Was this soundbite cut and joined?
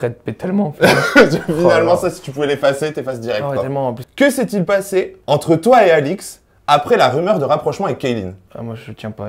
yes; 3 cuts; at 4.0 s, 5.2 s, 8.4 s

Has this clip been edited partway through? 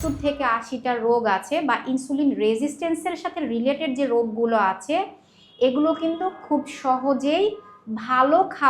no; 0 cuts

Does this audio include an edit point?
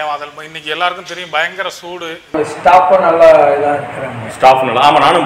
yes; 1 cut; at 2.3 s

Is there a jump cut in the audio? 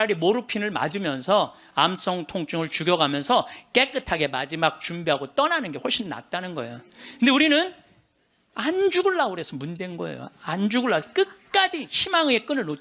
no; 0 cuts

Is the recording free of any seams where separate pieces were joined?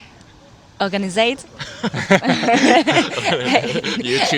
yes; 0 cuts

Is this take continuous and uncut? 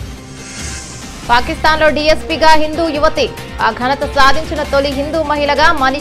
no; 1 cut; at 1.0 s

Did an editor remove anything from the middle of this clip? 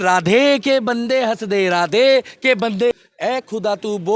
yes; 1 cut; at 2.9 s

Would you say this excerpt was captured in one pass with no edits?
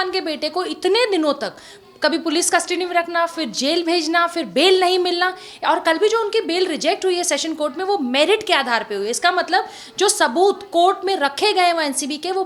yes; 0 cuts

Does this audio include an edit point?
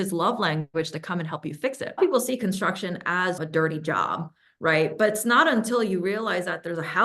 yes; 1 cut; at 2.0 s

